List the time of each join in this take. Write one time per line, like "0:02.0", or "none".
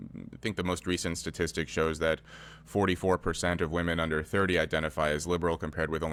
none